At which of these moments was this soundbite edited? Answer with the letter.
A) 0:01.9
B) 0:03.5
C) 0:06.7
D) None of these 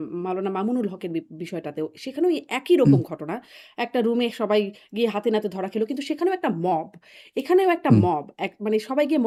D